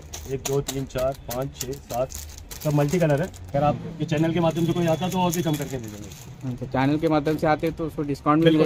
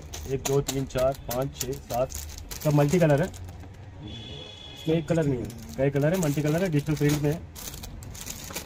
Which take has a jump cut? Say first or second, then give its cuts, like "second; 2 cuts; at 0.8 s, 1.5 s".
first; 1 cut; at 3.4 s